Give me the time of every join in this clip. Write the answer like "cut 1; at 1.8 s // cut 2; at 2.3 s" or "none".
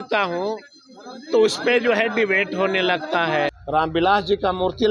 cut 1; at 3.6 s